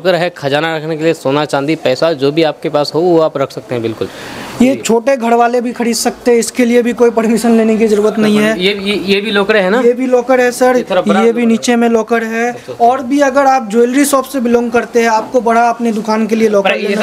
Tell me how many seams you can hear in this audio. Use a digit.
0